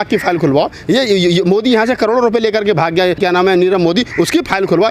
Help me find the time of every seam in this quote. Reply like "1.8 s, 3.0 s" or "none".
3.2 s